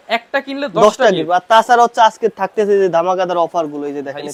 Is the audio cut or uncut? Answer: uncut